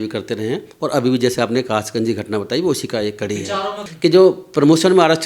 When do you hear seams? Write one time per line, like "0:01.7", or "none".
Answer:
0:03.8